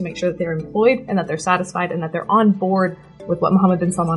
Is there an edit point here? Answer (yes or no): no